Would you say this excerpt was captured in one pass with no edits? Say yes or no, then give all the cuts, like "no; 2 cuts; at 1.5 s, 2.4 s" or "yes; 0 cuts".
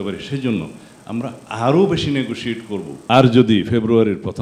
no; 1 cut; at 2.9 s